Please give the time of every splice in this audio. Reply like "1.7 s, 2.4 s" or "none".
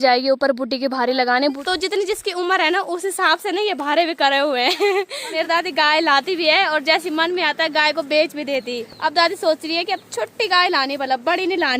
1.6 s, 5.3 s, 8.8 s